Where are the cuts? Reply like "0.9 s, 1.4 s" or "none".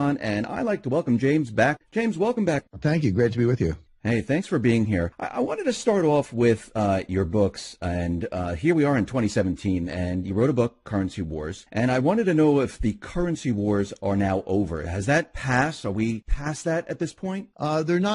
14.4 s